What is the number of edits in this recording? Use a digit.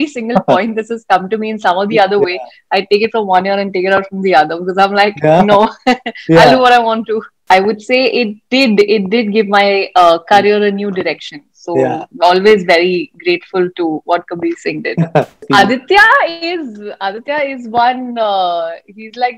2